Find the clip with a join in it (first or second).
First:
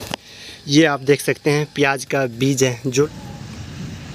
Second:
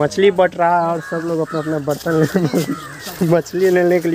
first